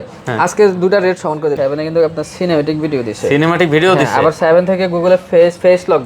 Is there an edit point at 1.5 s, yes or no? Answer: yes